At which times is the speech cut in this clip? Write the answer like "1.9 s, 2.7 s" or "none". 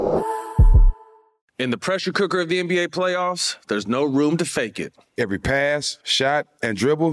1.1 s